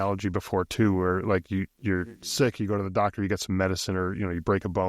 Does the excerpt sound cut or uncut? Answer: uncut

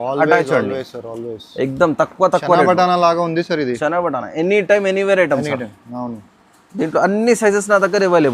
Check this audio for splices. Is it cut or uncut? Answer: uncut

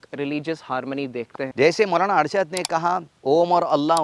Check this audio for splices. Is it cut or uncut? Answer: cut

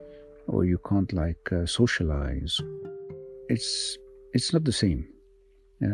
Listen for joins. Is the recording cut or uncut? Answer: cut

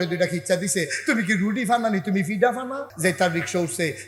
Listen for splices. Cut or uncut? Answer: cut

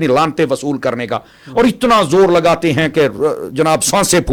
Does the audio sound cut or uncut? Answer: uncut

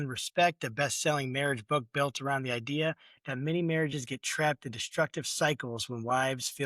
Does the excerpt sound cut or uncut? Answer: uncut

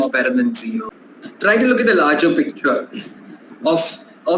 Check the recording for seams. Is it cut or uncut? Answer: cut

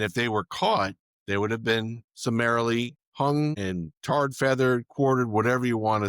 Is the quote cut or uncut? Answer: cut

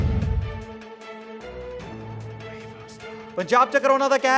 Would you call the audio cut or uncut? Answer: cut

